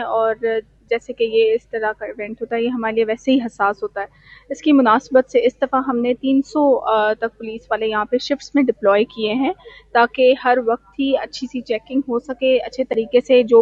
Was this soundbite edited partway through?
no; 0 cuts

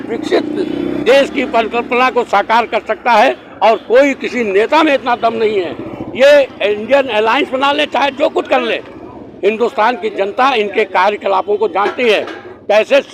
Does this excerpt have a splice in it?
no; 0 cuts

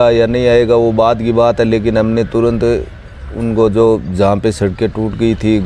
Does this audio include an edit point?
no; 0 cuts

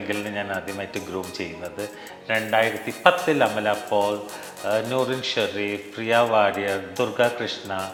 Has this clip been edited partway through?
no; 0 cuts

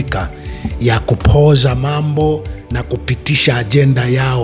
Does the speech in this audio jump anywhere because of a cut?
no; 0 cuts

